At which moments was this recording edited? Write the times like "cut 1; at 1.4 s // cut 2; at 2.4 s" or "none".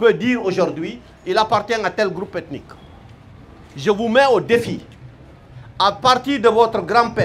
none

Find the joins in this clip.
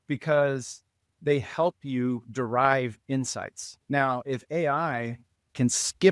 cut 1; at 3.8 s

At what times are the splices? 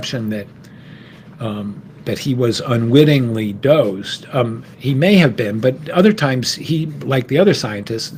none

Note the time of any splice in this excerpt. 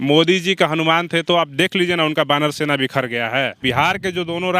cut 1; at 3.6 s

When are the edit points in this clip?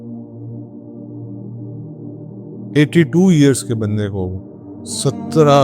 cut 1; at 2.7 s

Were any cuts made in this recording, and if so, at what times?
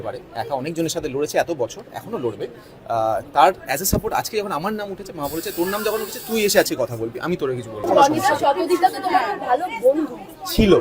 cut 1; at 7.9 s

